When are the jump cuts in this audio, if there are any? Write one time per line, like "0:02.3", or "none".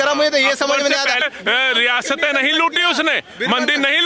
0:01.3